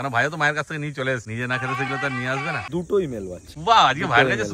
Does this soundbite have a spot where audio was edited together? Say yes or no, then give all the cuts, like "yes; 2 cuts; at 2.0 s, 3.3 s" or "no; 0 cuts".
yes; 3 cuts; at 1.3 s, 2.6 s, 3.5 s